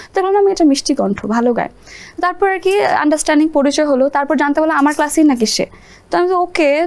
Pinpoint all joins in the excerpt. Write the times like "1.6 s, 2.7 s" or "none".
none

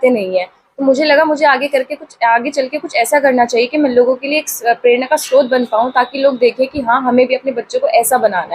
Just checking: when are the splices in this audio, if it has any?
none

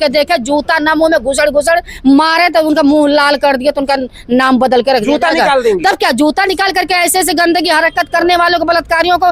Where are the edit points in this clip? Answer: none

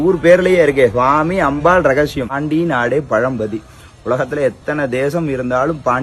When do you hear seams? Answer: 2.4 s

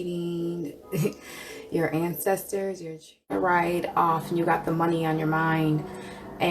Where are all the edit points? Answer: 3.3 s

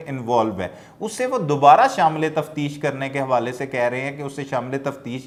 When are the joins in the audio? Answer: none

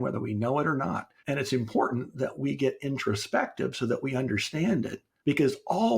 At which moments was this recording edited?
1.1 s, 5.0 s

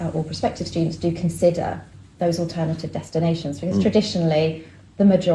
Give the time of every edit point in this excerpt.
none

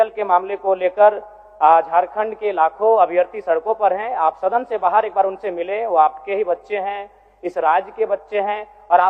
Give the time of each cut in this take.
none

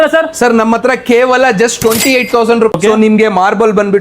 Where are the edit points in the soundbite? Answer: 2.7 s

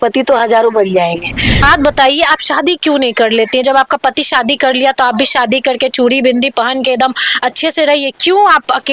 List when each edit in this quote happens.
1.7 s

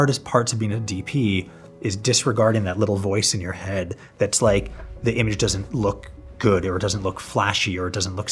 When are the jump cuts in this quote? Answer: none

